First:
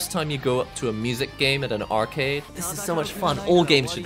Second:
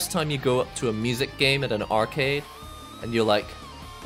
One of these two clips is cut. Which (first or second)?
first